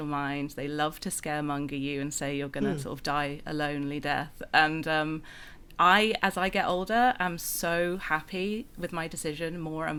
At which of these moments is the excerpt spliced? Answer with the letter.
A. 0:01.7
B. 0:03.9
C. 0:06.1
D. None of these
D